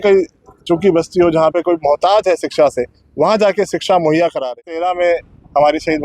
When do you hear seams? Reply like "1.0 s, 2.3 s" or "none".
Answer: 4.7 s